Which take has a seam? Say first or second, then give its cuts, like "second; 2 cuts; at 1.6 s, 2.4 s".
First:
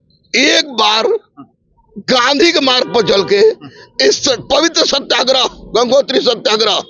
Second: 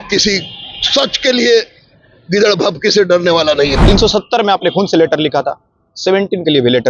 second; 1 cut; at 3.8 s